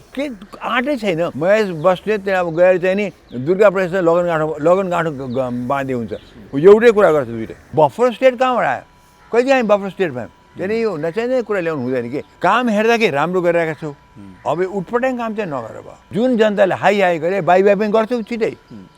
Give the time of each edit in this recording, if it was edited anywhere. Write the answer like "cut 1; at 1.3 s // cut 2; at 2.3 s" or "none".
cut 1; at 1.3 s // cut 2; at 7.6 s // cut 3; at 12.2 s // cut 4; at 16.1 s